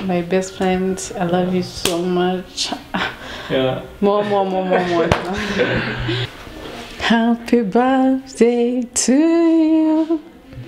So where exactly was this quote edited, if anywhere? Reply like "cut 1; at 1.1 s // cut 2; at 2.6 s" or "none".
cut 1; at 6.2 s

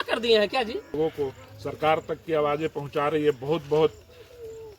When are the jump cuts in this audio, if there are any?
cut 1; at 0.9 s

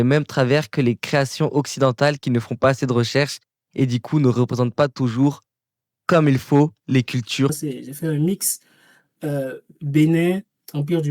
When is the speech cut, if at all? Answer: cut 1; at 7.6 s

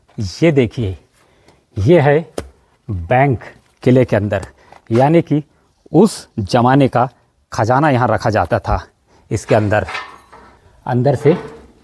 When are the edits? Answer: none

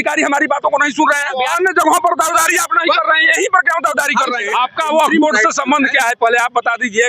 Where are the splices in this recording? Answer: cut 1; at 1.3 s // cut 2; at 4.4 s

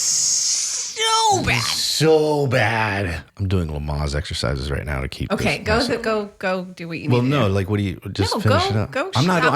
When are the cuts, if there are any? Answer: cut 1; at 3.2 s

